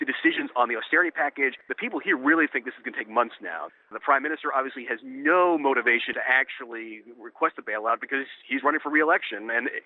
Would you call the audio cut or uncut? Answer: cut